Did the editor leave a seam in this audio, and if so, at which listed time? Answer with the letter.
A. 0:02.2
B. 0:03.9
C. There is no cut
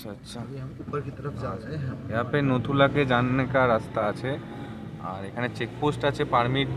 B